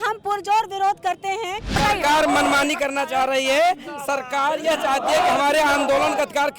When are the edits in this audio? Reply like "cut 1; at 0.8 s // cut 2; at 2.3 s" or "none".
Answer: cut 1; at 1.8 s